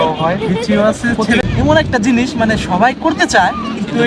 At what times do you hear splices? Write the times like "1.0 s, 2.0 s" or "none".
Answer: 1.4 s